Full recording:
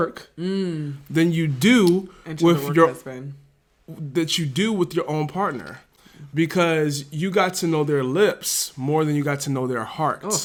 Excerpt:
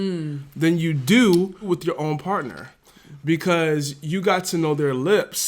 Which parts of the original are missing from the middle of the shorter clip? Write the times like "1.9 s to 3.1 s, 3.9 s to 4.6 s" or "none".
2.2 s to 4.7 s